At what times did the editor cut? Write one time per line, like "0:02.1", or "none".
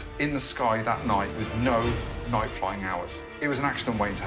0:01.4
0:03.2

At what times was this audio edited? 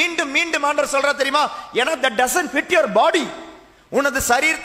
none

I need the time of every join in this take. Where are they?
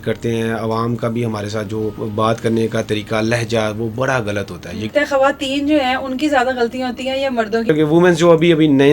0:02.0
0:04.9
0:07.7

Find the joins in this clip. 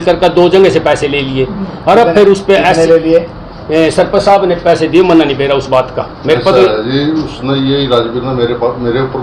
none

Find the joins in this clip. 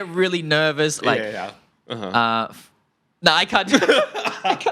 0:01.0

